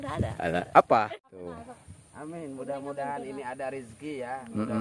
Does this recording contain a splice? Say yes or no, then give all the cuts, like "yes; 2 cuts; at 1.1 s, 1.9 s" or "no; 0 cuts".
yes; 1 cut; at 1.1 s